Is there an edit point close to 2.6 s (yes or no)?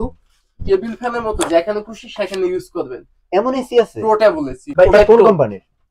no